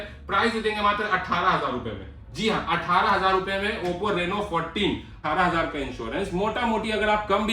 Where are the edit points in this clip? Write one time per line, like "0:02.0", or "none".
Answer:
0:05.2

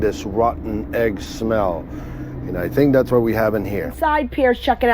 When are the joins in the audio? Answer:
0:03.9

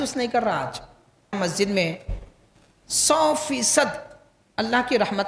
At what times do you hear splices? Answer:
0:01.4

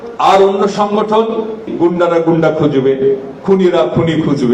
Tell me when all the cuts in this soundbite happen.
0:01.7

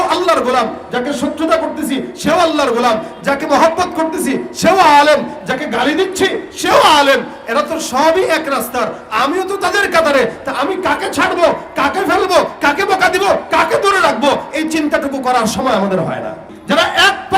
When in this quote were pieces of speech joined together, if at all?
0:16.5

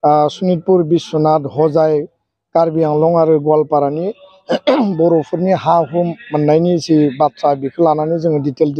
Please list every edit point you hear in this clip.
none

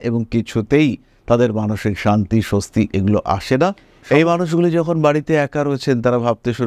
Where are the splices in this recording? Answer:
0:03.9

